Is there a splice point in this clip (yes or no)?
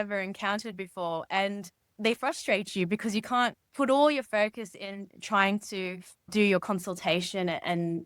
yes